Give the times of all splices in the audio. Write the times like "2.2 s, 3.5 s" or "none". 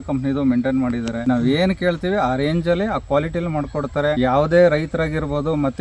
1.1 s, 4.2 s